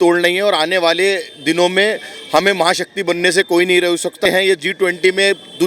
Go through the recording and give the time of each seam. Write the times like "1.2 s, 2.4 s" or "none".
4.2 s